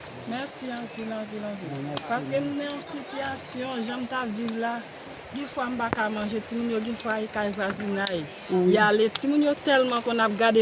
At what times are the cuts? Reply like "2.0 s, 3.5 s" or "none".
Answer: 4.5 s